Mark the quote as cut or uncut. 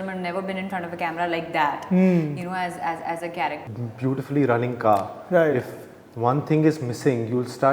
cut